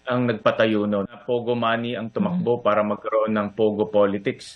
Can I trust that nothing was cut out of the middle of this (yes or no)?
no